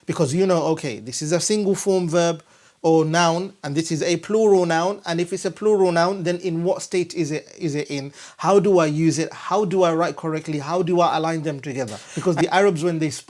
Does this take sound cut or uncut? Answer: cut